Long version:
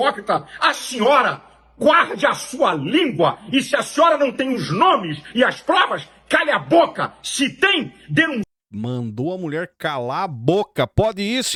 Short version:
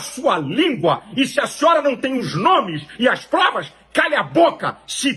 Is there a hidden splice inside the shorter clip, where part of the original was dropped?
no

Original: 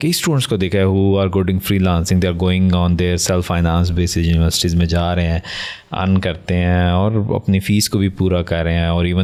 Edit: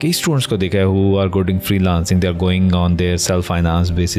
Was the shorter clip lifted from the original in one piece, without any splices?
yes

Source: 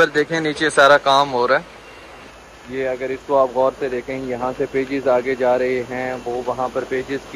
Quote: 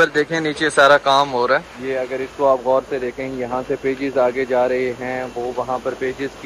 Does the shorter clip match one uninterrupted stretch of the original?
no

